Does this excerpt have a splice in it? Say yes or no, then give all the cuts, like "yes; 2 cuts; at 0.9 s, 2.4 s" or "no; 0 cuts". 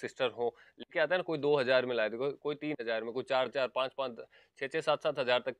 no; 0 cuts